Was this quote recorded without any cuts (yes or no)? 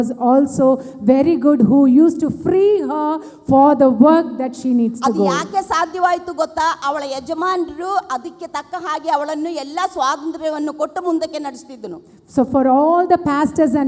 yes